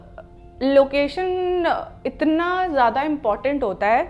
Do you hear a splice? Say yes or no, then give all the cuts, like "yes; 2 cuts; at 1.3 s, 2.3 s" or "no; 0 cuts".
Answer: no; 0 cuts